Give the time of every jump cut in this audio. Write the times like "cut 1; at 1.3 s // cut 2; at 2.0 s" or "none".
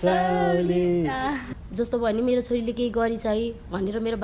cut 1; at 1.4 s